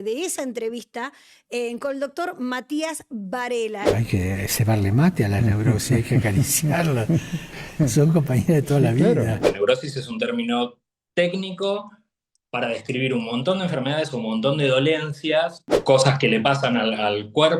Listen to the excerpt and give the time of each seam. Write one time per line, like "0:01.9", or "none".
0:03.9
0:09.4
0:15.7